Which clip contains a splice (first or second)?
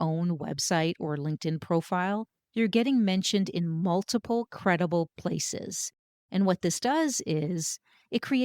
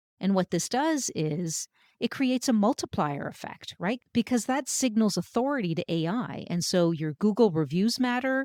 first